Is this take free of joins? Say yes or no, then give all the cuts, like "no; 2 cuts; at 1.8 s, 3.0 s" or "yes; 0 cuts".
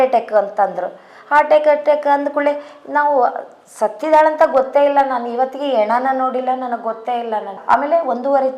no; 1 cut; at 7.6 s